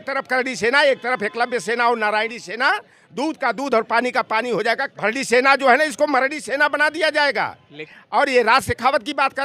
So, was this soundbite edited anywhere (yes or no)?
yes